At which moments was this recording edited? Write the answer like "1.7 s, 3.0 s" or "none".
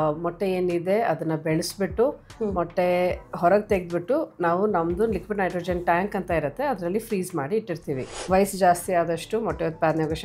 8.1 s